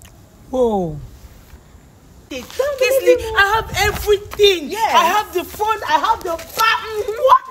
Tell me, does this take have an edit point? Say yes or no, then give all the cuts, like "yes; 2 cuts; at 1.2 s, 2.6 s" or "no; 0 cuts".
yes; 1 cut; at 2.2 s